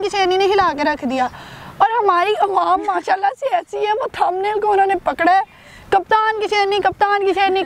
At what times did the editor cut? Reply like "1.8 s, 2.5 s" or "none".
none